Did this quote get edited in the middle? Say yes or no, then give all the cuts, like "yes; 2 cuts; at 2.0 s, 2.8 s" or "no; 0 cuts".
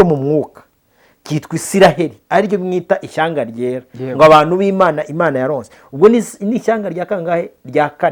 no; 0 cuts